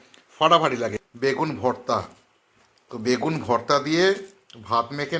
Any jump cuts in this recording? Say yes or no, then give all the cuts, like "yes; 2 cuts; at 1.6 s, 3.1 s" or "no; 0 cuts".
yes; 1 cut; at 1.0 s